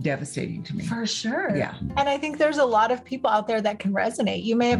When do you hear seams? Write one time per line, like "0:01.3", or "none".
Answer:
none

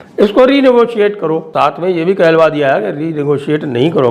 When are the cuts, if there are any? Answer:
0:01.5

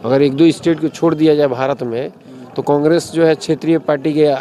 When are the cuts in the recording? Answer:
none

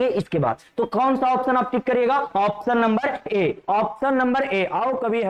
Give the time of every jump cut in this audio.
none

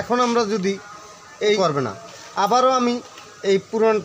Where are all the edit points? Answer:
0:01.6

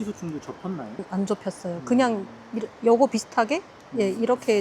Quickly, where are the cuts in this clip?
0:01.0

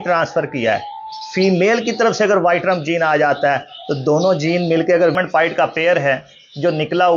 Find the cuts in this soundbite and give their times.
0:05.1

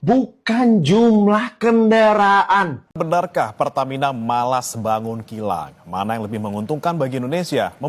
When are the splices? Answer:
0:02.8

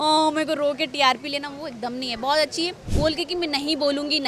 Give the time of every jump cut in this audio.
0:02.8

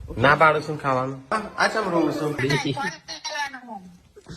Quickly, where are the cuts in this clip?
0:01.2
0:02.4

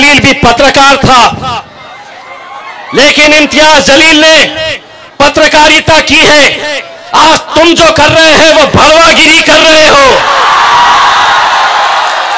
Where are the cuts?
none

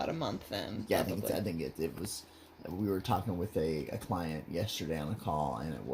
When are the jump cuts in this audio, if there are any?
none

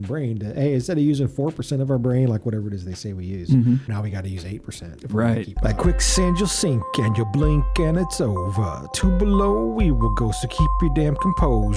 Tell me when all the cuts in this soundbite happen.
0:03.9
0:05.5

